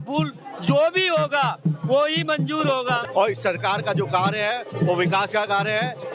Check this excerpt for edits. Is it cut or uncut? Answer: cut